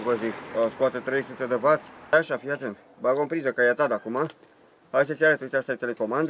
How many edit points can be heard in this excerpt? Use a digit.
1